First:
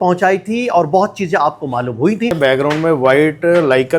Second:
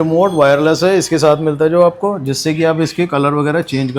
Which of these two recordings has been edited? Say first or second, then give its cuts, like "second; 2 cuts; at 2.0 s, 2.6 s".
first; 1 cut; at 2.4 s